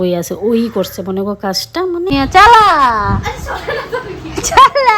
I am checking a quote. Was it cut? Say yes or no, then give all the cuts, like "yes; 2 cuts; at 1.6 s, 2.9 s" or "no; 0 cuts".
yes; 1 cut; at 2.1 s